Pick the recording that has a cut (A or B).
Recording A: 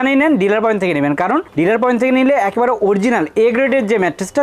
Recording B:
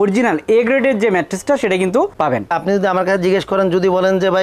B